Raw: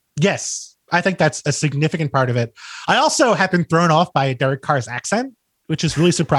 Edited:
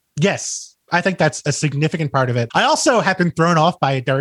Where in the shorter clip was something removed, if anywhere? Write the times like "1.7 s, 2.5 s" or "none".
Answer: 2.5 s